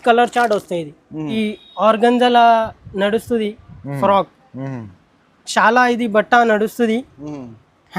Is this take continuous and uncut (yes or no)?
no